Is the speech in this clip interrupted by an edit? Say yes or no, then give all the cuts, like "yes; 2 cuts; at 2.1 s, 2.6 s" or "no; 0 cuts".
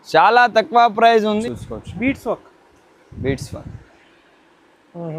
yes; 1 cut; at 1.4 s